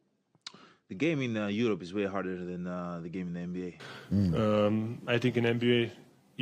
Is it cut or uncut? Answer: cut